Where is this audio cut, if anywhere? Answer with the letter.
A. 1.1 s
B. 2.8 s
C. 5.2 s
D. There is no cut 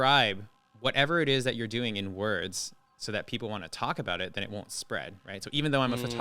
D